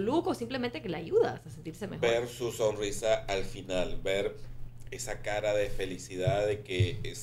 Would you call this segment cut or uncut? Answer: uncut